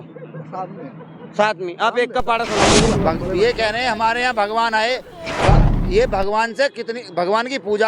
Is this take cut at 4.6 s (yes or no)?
no